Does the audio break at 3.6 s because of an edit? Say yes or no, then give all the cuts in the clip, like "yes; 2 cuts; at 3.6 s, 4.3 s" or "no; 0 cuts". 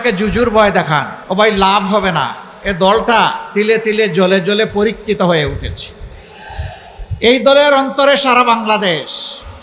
no; 1 cut; at 1.2 s